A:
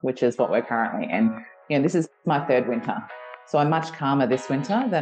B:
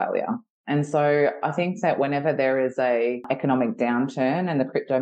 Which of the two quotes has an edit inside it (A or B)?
B